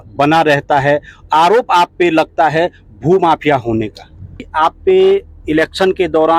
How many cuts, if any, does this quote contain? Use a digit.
1